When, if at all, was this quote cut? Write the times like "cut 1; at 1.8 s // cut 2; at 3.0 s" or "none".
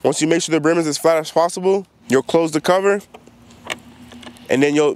cut 1; at 1.9 s // cut 2; at 3.6 s